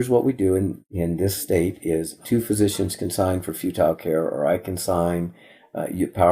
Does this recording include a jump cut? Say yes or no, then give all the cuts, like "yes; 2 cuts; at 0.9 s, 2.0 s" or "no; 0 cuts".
yes; 2 cuts; at 1.3 s, 2.2 s